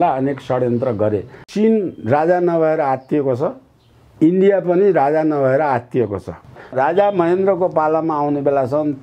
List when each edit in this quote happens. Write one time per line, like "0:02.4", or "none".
0:01.5
0:06.6